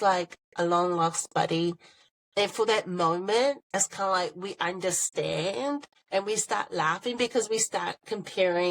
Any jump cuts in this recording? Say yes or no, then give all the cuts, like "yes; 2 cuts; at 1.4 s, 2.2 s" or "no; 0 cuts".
yes; 2 cuts; at 3.6 s, 5.9 s